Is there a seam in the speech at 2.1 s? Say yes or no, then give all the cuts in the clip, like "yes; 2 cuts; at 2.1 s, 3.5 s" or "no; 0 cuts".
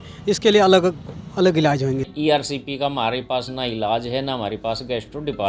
yes; 1 cut; at 2.1 s